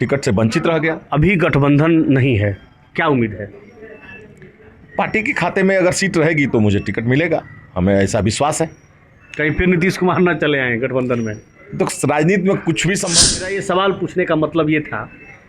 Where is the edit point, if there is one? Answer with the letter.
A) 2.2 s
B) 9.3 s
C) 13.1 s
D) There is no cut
C